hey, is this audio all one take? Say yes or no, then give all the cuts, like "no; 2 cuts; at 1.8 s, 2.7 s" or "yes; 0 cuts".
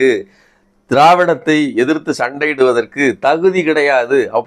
yes; 0 cuts